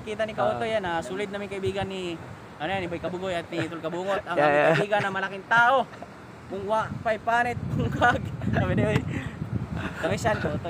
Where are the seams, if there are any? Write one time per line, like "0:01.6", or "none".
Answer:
0:08.2